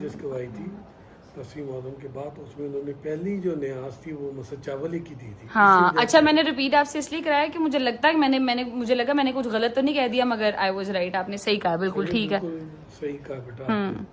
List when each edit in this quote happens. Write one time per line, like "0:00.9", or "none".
none